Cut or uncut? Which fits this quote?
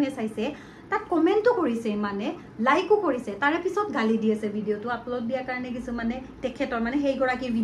uncut